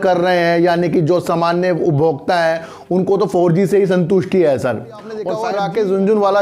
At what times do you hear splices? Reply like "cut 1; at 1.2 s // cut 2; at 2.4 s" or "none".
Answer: cut 1; at 5.3 s